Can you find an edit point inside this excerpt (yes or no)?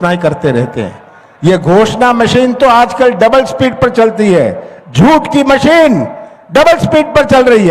no